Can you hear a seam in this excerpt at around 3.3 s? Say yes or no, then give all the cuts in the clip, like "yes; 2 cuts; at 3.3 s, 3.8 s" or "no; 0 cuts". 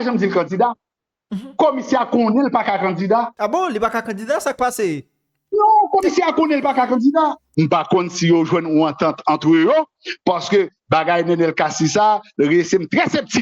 yes; 2 cuts; at 3.3 s, 7.4 s